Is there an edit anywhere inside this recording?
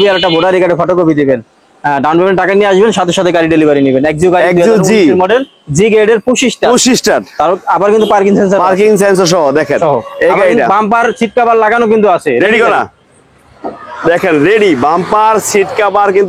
no; 0 cuts

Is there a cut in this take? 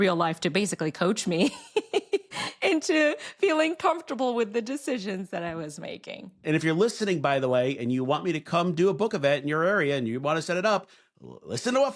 yes; 1 cut; at 6.4 s

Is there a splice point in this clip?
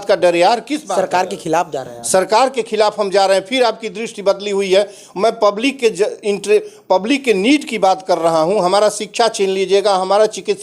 no; 0 cuts

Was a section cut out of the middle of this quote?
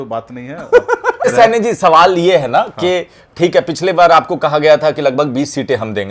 yes; 1 cut; at 1.3 s

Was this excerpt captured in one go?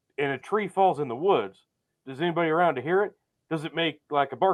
yes; 0 cuts

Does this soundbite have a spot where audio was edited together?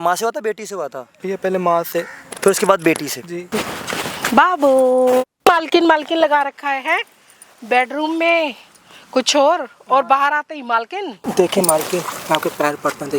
yes; 4 cuts; at 1.1 s, 3.4 s, 5.3 s, 11.2 s

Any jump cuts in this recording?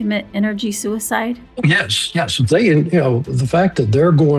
no; 0 cuts

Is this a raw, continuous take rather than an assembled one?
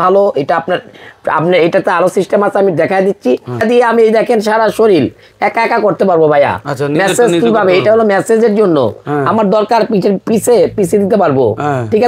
no; 1 cut; at 3.6 s

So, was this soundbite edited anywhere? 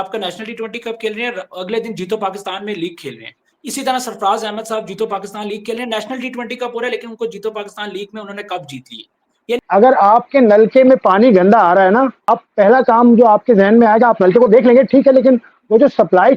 yes; 2 cuts; at 9.5 s, 12.3 s

